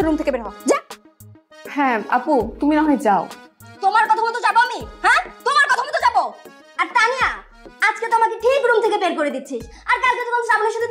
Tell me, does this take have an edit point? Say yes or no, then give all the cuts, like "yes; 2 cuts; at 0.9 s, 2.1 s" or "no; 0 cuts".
no; 0 cuts